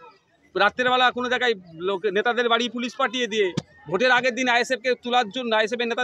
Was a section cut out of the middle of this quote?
no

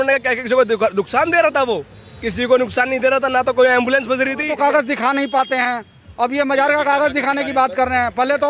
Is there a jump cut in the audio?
yes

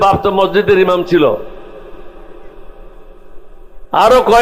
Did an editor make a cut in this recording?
no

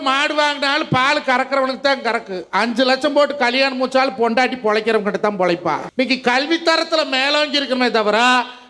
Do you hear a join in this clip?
yes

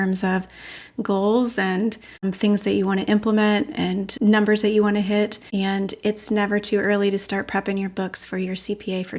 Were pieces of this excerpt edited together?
yes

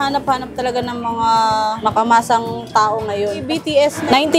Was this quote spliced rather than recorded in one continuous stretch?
yes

